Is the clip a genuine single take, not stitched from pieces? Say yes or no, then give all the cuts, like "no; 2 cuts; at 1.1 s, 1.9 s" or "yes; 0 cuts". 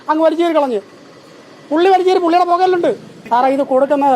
no; 1 cut; at 3.1 s